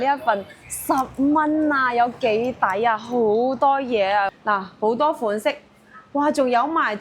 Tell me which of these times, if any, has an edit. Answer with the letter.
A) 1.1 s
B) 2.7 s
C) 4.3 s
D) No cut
C